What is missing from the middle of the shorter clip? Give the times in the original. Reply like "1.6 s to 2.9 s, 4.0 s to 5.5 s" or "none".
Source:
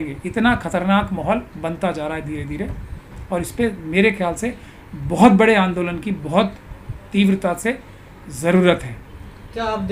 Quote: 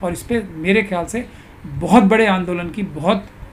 none